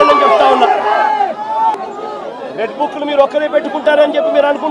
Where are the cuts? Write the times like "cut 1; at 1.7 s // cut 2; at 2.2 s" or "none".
cut 1; at 1.8 s